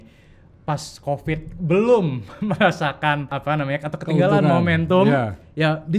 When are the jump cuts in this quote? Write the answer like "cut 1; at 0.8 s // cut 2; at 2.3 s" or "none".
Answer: cut 1; at 3.3 s